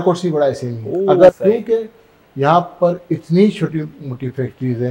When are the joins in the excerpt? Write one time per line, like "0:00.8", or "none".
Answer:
0:01.3